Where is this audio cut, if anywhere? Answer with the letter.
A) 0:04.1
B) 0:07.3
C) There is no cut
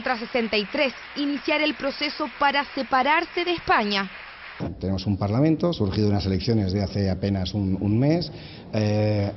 B